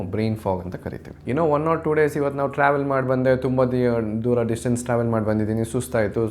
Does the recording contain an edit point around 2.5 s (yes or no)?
no